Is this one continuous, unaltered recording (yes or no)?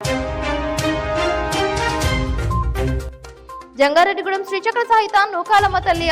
no